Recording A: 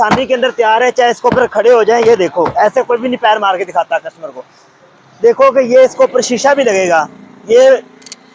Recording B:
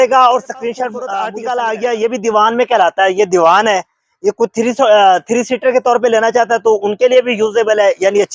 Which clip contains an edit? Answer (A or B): B